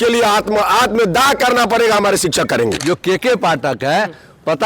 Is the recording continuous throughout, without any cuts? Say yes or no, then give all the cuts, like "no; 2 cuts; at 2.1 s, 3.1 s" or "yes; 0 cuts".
no; 1 cut; at 2.8 s